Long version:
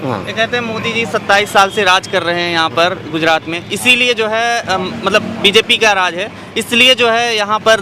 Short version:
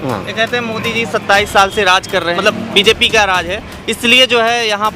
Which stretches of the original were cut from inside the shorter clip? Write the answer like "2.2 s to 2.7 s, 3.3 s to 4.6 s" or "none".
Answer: 2.4 s to 5.1 s